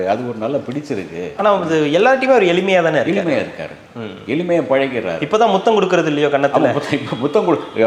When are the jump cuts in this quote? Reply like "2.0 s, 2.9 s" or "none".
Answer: none